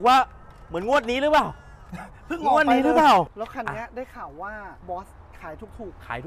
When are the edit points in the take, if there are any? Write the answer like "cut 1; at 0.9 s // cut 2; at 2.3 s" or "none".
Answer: cut 1; at 3.4 s